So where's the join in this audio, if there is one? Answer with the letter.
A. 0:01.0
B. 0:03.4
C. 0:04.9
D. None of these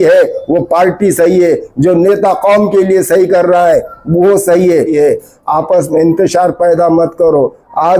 C